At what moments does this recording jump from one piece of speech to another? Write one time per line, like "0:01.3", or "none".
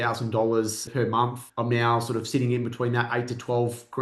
0:01.2